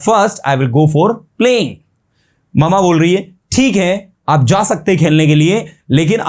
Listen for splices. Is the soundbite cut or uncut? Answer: uncut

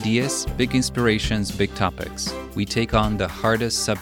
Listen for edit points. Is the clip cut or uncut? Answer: uncut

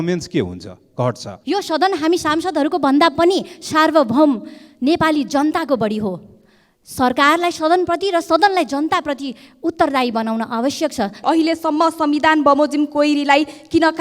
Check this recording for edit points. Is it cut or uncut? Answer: cut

